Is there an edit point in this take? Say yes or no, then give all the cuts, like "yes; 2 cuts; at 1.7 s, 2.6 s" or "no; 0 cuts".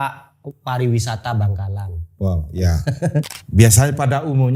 yes; 1 cut; at 3.4 s